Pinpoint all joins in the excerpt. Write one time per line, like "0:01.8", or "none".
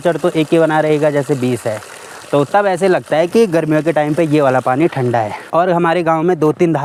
none